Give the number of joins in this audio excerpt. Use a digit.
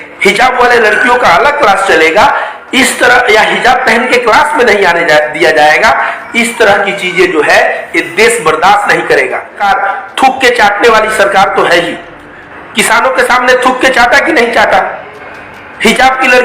1